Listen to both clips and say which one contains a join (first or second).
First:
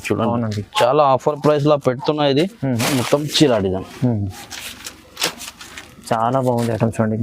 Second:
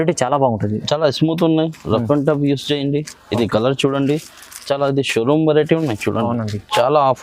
first